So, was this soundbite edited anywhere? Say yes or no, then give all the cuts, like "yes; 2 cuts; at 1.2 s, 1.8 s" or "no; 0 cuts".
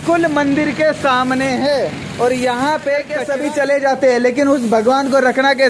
yes; 1 cut; at 3.2 s